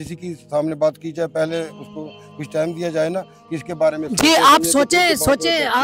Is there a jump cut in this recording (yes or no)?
no